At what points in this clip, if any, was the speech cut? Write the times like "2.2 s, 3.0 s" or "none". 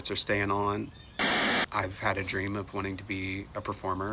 1.5 s